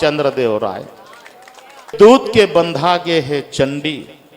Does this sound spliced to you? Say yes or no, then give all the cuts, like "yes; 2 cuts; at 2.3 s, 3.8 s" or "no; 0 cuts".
yes; 1 cut; at 1.9 s